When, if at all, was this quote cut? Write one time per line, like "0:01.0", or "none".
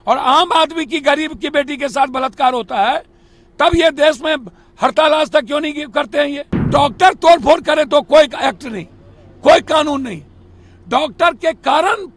0:06.7